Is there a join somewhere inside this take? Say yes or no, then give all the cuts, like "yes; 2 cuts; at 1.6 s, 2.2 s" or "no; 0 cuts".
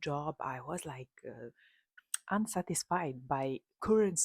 yes; 1 cut; at 1.9 s